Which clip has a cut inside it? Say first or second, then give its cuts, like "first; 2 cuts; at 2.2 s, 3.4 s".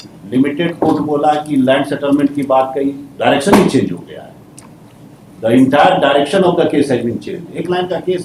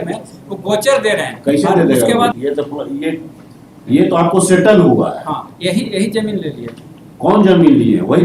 second; 1 cut; at 2.4 s